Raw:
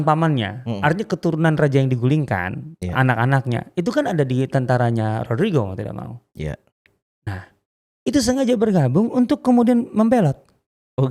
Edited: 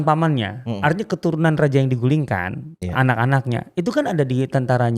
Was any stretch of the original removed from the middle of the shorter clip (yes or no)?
no